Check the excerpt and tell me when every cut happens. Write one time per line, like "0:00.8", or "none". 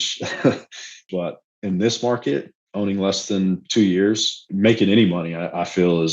0:01.0
0:04.4